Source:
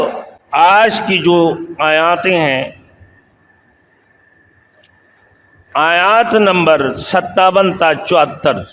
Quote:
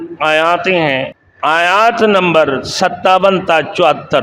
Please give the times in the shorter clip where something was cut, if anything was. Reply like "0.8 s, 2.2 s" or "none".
1.2 s